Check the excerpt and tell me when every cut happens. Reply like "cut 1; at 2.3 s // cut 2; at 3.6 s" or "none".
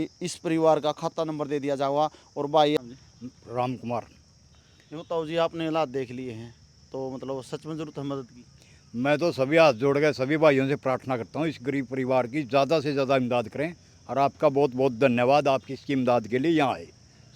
cut 1; at 2.8 s